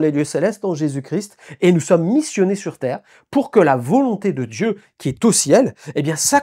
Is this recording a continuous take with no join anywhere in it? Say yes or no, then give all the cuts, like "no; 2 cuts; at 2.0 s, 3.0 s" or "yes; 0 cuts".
yes; 0 cuts